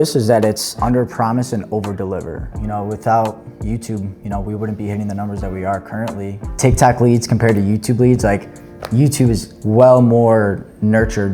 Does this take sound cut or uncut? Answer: cut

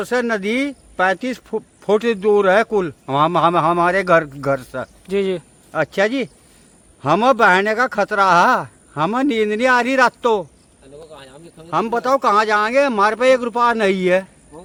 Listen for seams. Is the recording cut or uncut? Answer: uncut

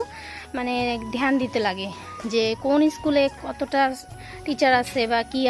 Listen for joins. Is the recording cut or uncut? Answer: uncut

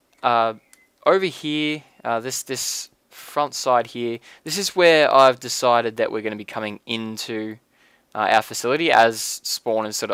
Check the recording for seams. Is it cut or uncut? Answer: uncut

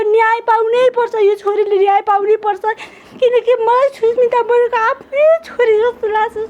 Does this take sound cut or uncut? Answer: uncut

